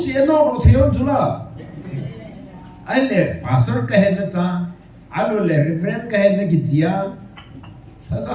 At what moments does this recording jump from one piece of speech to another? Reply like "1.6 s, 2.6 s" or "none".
none